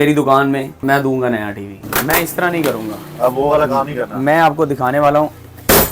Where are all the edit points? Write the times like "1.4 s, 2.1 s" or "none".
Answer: 0.8 s, 1.8 s